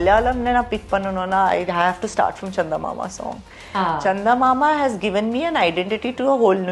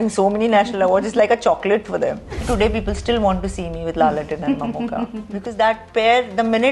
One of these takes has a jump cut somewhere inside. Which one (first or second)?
second